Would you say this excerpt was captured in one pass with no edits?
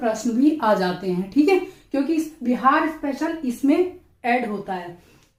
yes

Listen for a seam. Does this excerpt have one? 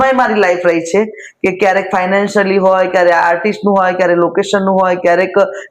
no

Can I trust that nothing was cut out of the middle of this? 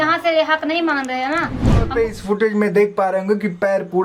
no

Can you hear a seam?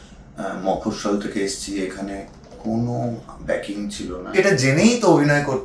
yes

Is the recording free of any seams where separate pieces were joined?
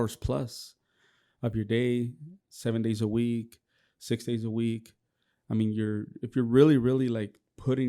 yes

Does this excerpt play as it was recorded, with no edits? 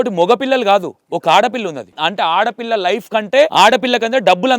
no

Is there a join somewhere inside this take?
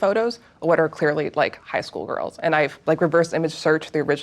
yes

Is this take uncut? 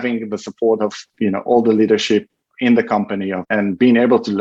no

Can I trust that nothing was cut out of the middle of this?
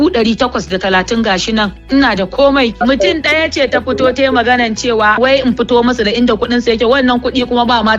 no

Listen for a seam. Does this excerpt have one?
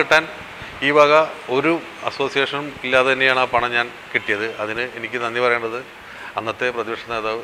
no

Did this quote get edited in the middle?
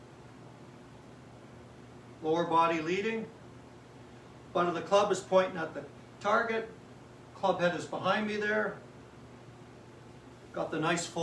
no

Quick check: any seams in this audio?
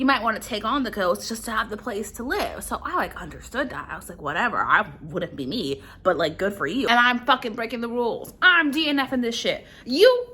yes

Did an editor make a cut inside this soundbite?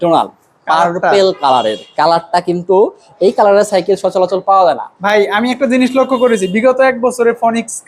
no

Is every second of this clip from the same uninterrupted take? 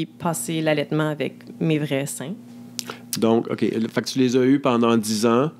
yes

